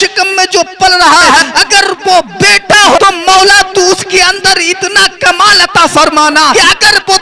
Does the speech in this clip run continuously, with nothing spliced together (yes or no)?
no